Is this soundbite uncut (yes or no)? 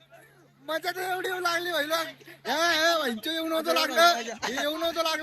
yes